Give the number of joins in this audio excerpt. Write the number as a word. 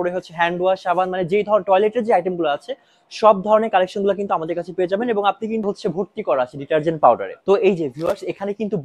one